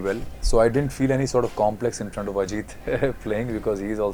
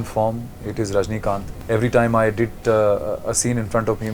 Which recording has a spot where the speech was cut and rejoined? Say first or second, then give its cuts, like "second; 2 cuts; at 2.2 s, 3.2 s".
second; 1 cut; at 1.5 s